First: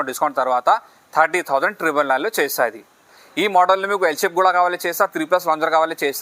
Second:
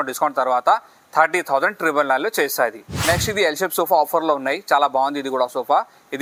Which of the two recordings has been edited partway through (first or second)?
first